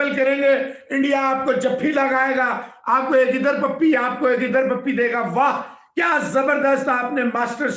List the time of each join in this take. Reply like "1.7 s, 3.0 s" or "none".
none